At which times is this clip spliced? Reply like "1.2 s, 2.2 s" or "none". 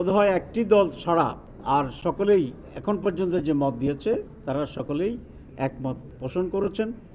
1.5 s, 2.7 s, 4.3 s, 6.1 s